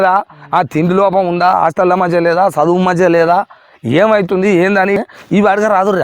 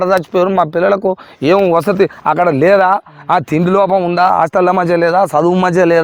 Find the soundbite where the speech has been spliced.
first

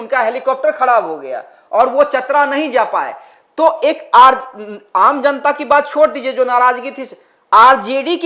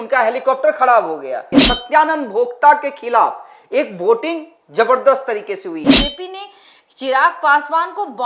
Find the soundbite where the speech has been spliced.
second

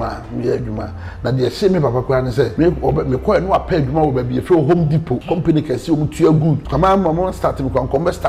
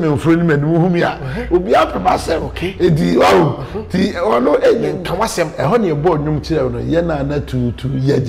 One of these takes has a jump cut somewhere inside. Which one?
first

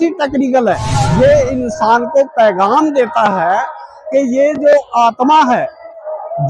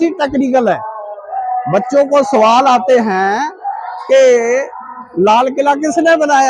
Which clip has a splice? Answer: first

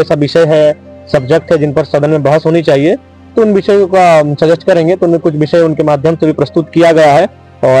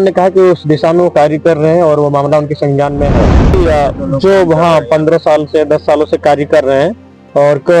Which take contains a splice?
second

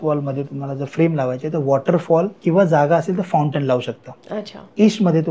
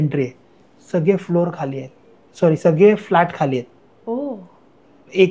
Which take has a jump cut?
first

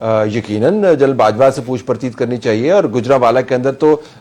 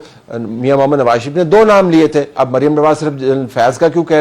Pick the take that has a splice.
second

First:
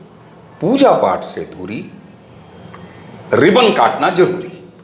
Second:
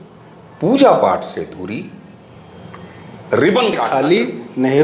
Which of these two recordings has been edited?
second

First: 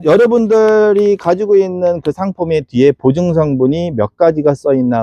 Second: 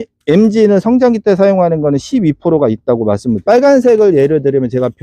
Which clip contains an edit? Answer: second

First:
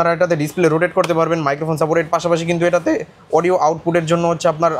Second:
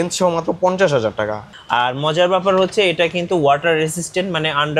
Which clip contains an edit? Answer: second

